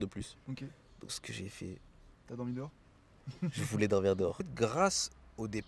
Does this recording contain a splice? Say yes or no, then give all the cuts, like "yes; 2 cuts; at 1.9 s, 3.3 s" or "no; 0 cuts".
yes; 1 cut; at 4.5 s